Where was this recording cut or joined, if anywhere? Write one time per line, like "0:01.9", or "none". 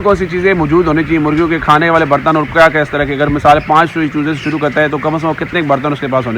none